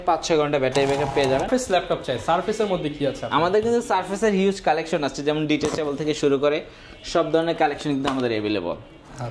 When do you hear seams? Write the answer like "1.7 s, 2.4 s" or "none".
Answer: 1.5 s